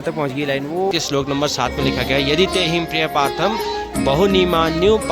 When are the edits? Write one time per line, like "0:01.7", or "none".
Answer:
0:00.9